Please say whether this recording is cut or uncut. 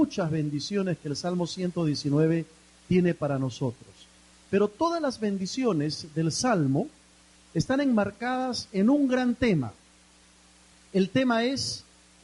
cut